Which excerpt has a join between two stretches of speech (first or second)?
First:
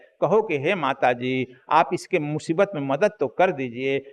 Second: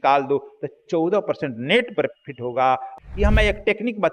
second